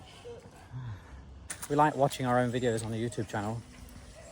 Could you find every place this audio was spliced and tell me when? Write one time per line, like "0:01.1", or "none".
0:01.5